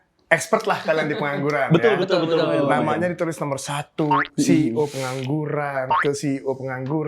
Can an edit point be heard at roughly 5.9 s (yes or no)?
yes